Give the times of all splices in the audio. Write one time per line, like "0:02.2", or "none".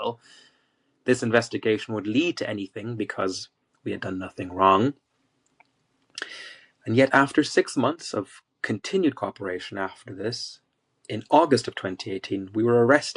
none

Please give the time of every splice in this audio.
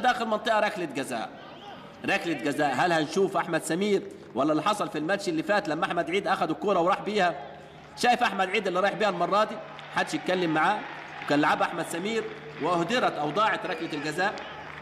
none

